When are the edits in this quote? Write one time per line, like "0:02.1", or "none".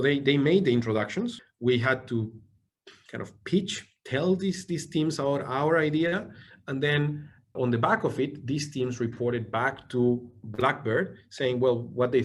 0:01.5